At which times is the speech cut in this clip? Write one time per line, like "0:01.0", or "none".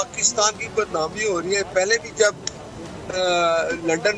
none